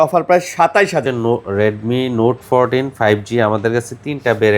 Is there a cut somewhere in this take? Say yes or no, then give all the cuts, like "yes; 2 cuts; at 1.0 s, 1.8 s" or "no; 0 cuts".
yes; 1 cut; at 1.0 s